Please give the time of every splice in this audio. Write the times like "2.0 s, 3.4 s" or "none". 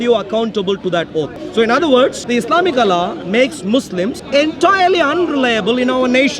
1.4 s, 2.2 s, 4.2 s